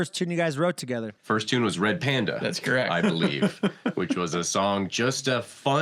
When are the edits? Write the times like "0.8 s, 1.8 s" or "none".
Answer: 1.2 s